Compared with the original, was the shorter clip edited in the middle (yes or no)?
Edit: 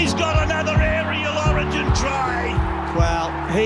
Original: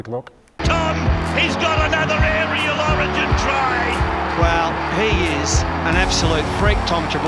no